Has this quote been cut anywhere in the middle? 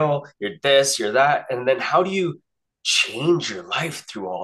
no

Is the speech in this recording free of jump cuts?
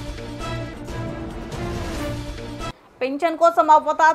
yes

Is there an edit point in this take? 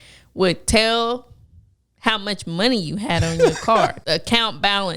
yes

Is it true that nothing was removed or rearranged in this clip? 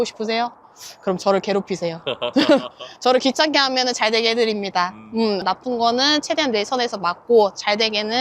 no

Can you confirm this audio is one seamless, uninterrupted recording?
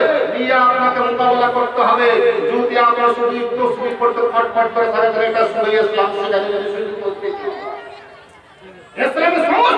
yes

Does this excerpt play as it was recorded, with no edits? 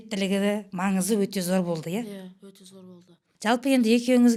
yes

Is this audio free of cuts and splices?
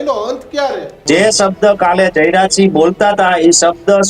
no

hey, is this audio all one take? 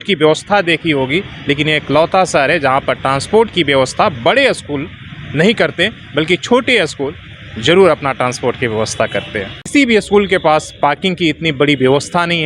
no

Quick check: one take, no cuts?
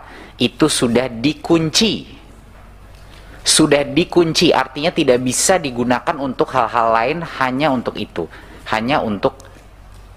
yes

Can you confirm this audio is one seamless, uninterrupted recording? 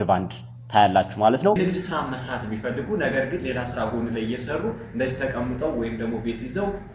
no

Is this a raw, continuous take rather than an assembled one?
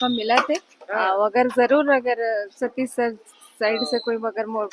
yes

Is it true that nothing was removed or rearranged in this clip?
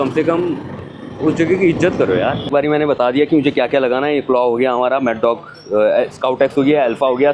no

